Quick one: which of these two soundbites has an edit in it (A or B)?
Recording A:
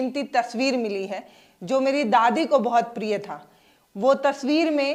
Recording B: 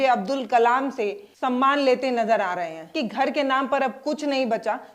B